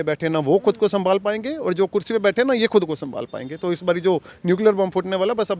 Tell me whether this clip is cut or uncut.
uncut